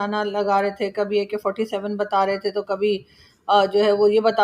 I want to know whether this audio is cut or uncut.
uncut